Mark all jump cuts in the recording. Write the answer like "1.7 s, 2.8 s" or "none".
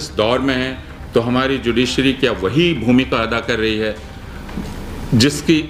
none